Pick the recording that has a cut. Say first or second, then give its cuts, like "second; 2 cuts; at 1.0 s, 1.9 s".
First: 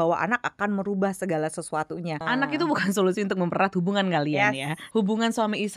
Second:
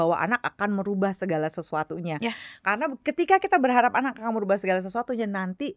first; 2 cuts; at 2.2 s, 4.8 s